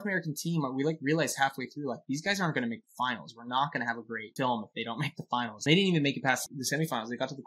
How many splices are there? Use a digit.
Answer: 3